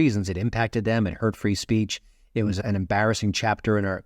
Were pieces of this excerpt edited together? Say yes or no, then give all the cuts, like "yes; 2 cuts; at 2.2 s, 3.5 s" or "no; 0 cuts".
no; 0 cuts